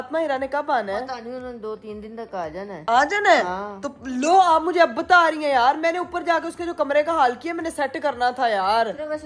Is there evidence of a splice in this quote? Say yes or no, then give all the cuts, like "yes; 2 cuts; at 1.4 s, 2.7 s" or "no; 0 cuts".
no; 0 cuts